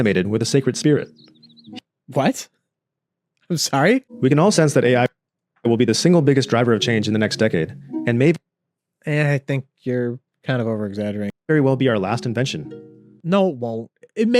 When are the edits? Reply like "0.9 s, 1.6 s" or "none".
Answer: 4.1 s, 11.3 s